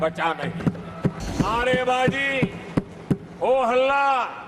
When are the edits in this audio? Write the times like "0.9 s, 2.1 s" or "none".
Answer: 1.2 s